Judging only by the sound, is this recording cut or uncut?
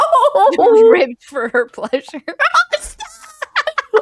cut